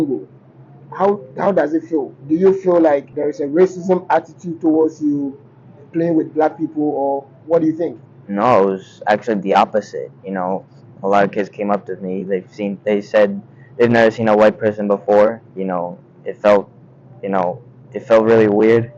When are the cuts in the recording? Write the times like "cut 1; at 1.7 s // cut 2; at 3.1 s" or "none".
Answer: cut 1; at 3.1 s